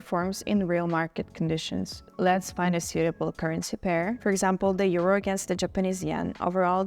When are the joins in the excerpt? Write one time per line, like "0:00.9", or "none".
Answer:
0:02.0
0:04.2